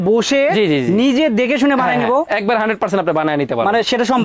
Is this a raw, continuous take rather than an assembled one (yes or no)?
yes